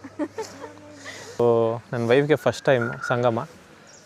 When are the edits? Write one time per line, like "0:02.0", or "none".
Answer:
0:01.4